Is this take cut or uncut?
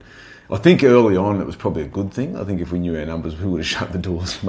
uncut